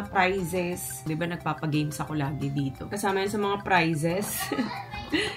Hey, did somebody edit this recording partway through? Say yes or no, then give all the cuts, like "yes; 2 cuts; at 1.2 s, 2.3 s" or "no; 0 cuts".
yes; 2 cuts; at 1.0 s, 2.9 s